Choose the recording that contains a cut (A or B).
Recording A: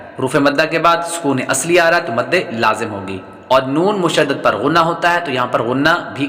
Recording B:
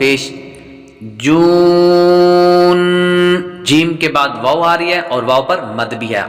B